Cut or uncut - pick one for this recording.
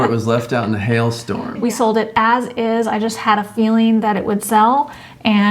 cut